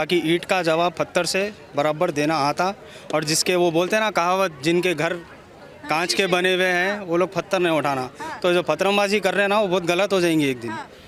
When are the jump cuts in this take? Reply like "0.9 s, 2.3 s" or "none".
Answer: none